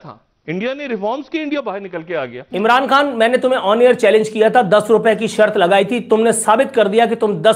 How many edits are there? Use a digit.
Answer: 1